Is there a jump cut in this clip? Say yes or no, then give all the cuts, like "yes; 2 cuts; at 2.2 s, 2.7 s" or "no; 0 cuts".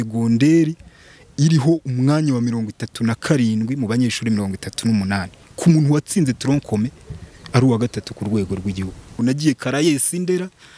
yes; 1 cut; at 9.2 s